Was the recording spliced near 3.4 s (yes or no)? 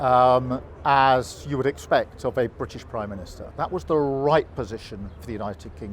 yes